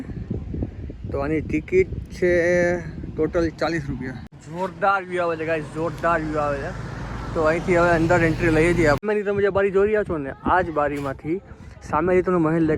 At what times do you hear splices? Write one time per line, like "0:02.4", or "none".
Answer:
0:04.4
0:09.0